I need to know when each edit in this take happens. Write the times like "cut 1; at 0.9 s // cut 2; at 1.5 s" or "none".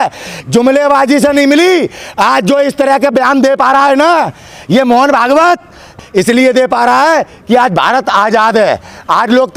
none